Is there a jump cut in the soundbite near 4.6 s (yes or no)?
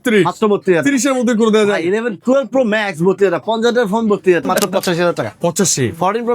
yes